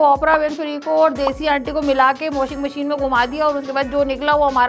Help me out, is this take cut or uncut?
uncut